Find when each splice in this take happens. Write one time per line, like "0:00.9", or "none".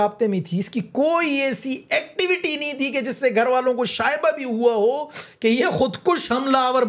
none